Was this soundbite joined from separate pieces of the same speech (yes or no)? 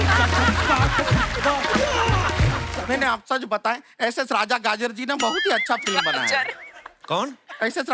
yes